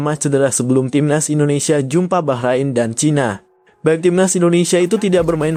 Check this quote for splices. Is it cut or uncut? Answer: uncut